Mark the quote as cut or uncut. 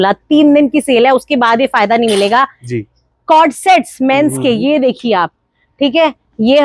uncut